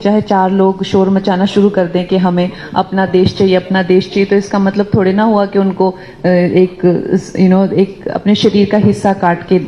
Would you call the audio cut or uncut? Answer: uncut